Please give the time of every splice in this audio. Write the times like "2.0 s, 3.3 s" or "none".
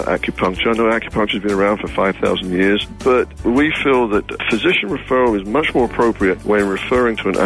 3.3 s, 4.4 s, 6.4 s